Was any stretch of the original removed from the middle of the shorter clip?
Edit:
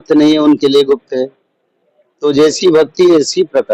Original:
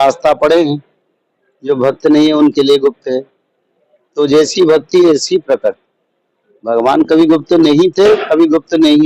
no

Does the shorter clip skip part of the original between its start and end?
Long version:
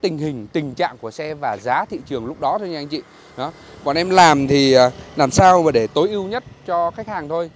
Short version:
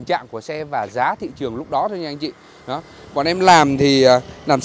no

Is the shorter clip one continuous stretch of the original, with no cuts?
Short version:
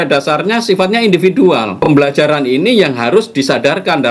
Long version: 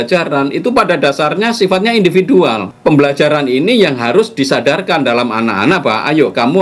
no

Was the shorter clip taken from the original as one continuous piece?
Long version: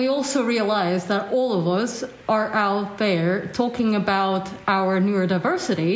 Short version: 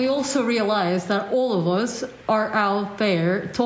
yes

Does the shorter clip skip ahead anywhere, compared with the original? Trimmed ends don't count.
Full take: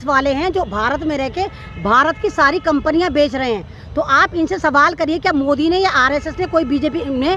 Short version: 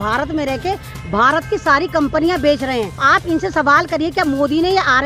yes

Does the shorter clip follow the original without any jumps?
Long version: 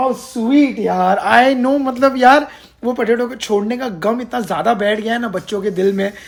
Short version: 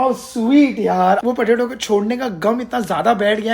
no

